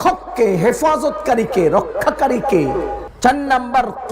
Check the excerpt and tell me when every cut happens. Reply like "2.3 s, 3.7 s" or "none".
3.1 s